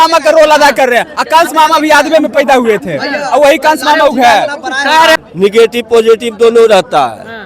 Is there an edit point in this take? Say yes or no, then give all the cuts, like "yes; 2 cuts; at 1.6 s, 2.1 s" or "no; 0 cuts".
yes; 1 cut; at 5.2 s